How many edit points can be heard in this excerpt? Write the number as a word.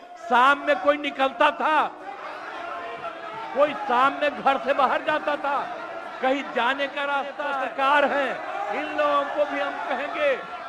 zero